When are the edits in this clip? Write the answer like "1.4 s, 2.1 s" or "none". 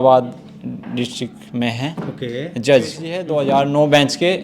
3.1 s